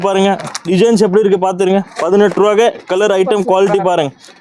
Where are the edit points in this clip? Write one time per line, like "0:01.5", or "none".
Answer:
none